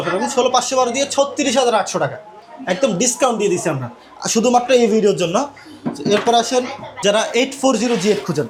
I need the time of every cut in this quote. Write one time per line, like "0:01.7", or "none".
none